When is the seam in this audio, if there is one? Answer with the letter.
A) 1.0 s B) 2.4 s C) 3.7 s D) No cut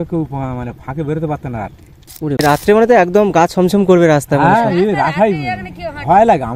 B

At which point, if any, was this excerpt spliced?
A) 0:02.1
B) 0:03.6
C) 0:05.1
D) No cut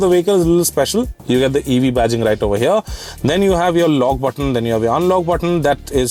D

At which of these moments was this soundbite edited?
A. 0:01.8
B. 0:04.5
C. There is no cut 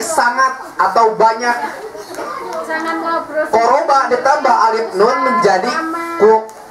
C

